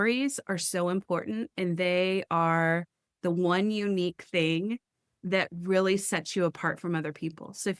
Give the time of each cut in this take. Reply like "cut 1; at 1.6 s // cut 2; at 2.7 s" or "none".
none